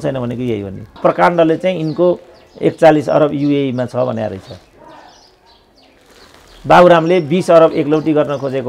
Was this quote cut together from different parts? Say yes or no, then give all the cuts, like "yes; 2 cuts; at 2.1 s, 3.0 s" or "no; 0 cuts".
yes; 1 cut; at 0.9 s